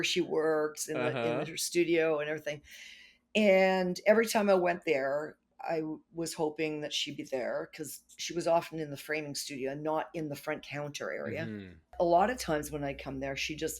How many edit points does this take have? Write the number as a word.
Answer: one